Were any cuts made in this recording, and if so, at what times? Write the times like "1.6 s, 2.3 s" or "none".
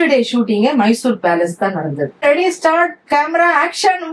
2.2 s